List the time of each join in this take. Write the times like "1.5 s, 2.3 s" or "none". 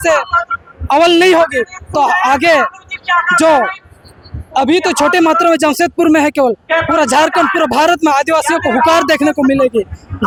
none